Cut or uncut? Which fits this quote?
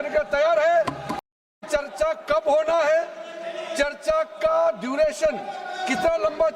cut